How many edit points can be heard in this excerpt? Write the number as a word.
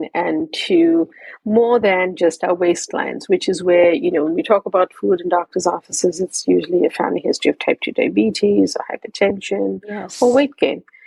zero